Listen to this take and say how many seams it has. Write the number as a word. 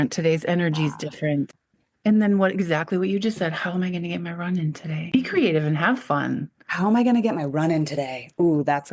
two